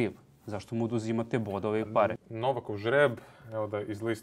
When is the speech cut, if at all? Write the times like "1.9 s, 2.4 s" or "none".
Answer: 2.2 s